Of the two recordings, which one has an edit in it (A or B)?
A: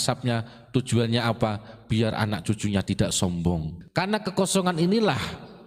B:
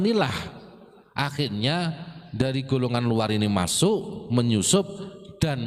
A